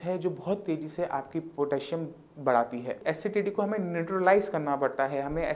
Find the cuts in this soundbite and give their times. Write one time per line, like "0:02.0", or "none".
0:03.0